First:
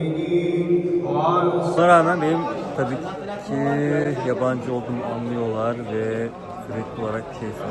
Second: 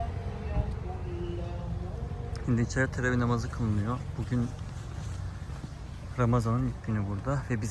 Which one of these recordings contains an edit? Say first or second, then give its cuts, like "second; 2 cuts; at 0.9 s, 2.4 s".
first; 1 cut; at 1.8 s